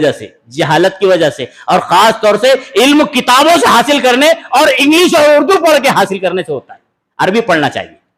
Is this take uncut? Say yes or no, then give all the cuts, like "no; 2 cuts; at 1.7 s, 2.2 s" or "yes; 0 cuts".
yes; 0 cuts